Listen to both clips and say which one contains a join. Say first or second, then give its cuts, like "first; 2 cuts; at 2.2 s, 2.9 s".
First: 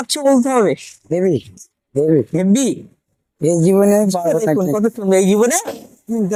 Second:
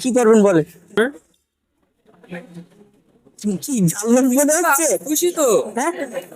second; 1 cut; at 1.0 s